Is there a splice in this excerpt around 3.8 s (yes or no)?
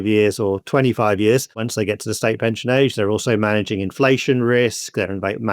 no